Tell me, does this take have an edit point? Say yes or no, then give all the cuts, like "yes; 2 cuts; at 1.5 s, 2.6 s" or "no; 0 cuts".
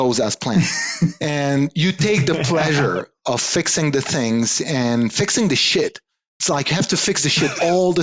no; 0 cuts